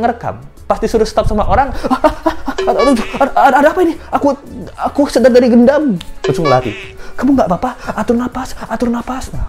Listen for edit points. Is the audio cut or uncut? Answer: uncut